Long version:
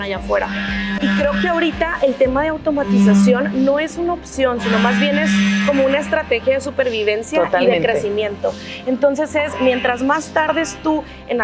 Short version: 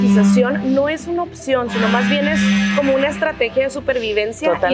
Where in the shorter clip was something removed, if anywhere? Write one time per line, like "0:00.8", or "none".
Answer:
none

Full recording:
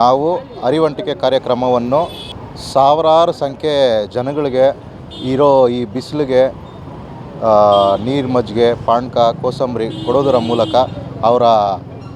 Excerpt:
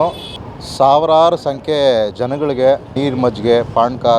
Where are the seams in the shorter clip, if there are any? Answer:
0:02.9

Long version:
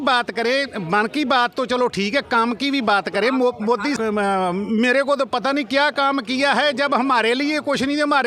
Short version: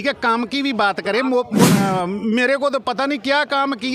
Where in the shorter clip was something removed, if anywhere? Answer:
0:01.7

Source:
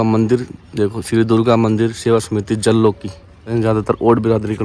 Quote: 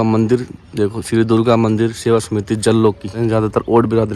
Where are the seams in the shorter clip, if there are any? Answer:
0:03.1

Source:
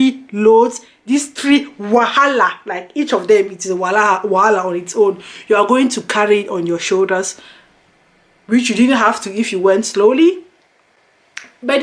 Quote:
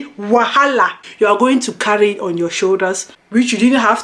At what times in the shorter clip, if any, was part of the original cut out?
0:01.0
0:03.1

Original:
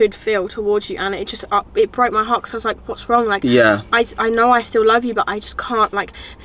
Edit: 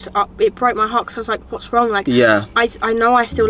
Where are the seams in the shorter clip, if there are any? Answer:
none

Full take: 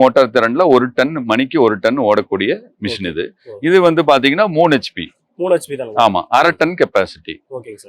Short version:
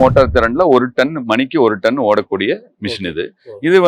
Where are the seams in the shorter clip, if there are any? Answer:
none

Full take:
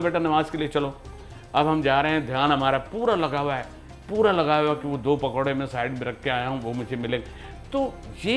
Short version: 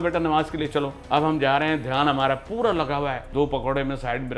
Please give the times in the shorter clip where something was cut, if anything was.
0:01.0
0:03.3

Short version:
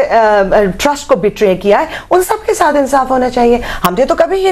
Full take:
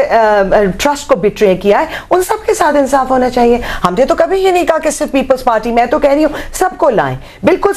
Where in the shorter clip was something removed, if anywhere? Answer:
none

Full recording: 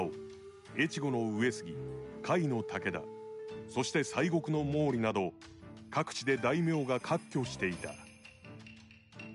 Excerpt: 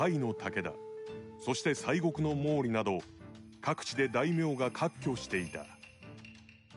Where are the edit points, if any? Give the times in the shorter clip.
0:05.8

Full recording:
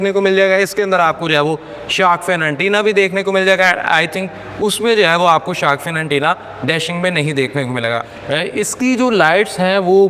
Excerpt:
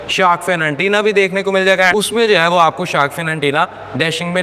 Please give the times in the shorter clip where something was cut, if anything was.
0:01.9

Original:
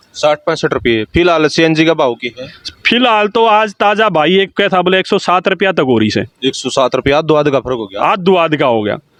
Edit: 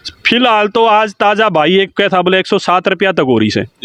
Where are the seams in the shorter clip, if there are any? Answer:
none

